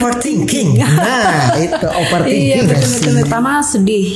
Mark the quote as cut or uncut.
cut